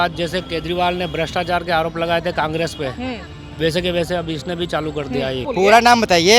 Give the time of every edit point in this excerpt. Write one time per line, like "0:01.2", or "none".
0:05.4